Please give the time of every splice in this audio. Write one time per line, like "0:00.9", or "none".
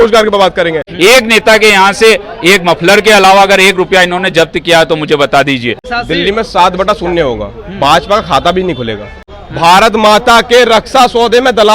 0:00.9
0:05.8
0:09.4